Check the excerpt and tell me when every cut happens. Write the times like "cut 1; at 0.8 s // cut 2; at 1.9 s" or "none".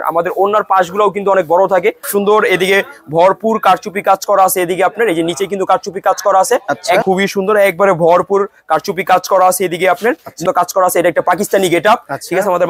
cut 1; at 2.0 s // cut 2; at 7.0 s // cut 3; at 10.4 s